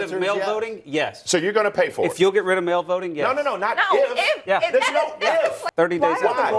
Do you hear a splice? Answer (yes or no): yes